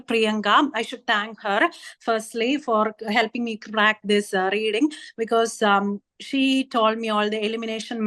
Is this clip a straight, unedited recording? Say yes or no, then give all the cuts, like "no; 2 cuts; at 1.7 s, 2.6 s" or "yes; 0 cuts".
yes; 0 cuts